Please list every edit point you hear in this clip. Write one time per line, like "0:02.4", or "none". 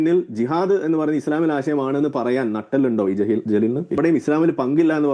0:04.0